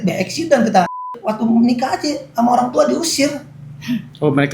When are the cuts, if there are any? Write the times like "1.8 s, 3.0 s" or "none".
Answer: 1.1 s